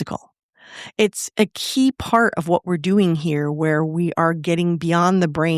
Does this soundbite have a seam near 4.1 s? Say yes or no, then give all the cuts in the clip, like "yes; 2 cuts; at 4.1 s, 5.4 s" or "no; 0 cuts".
no; 1 cut; at 1.2 s